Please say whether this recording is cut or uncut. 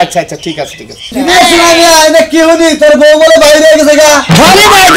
cut